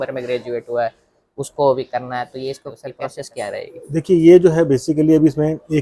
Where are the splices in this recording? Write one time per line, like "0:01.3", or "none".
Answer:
none